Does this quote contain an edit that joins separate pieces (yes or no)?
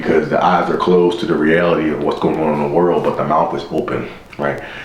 no